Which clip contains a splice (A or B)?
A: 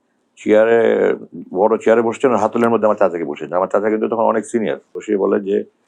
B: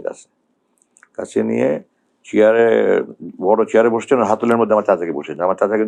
A